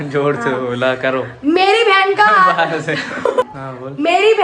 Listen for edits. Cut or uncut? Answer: cut